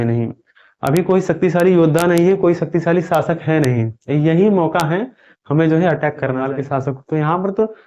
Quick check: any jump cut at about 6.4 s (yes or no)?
yes